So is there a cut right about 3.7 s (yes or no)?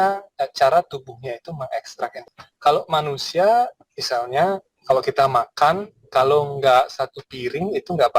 no